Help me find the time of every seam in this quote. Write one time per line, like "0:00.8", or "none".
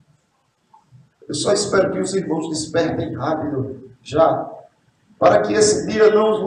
none